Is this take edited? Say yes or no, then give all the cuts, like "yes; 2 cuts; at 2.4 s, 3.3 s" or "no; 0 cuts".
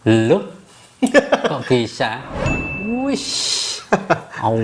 yes; 1 cut; at 2.4 s